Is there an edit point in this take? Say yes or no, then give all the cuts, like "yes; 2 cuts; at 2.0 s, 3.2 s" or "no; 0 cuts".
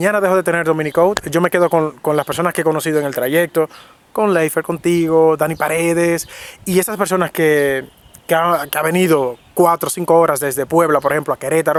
no; 0 cuts